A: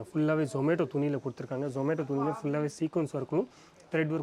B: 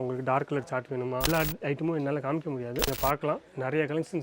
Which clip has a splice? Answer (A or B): B